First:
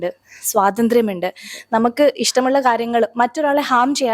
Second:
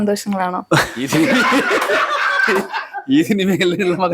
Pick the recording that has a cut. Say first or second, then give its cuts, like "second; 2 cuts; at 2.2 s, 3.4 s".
second; 1 cut; at 1.1 s